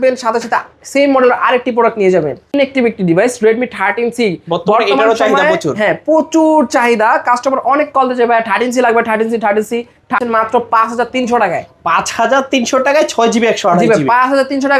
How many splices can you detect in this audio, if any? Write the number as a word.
two